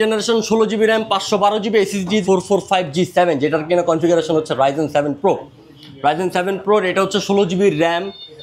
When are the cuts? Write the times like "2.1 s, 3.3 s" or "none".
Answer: 2.2 s